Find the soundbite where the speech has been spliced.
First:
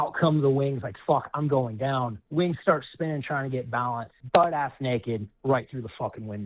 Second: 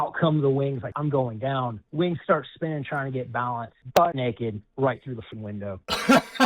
second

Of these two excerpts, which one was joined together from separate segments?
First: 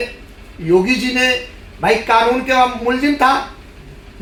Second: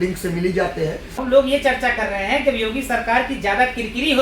second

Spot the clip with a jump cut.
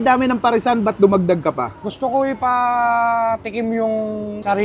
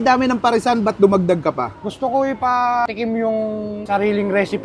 second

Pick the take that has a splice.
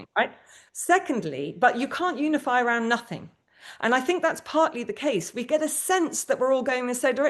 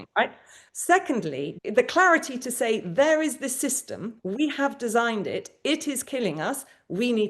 second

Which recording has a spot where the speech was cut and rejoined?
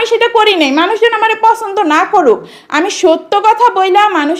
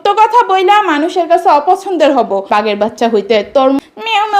second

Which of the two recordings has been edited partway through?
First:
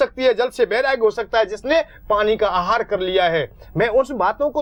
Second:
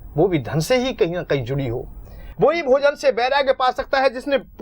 second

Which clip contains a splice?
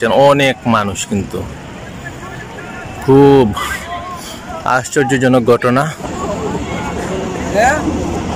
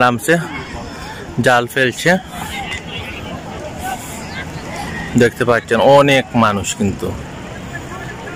first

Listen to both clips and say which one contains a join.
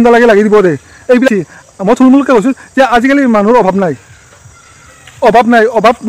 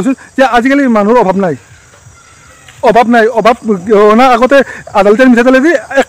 first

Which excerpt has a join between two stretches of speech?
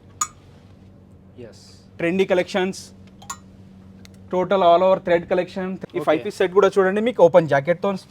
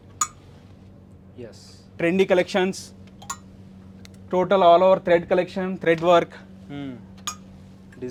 first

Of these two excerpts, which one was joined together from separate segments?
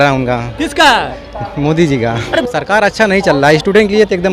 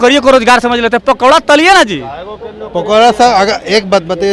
first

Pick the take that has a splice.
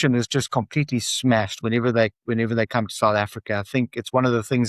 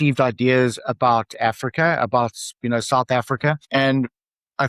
second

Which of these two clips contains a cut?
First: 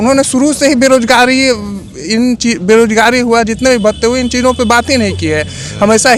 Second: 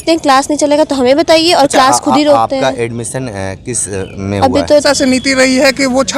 second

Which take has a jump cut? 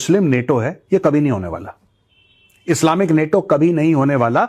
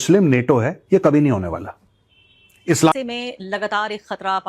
second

